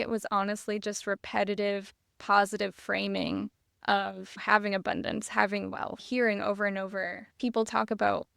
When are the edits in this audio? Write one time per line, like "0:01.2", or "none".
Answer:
0:04.3
0:06.0
0:07.2